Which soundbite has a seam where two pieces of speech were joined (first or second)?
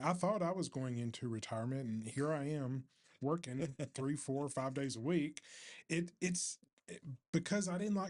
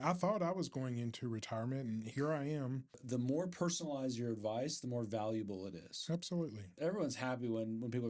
second